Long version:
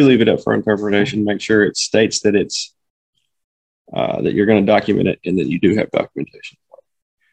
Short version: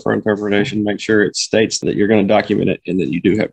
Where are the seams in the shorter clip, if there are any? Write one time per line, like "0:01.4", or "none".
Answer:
0:01.8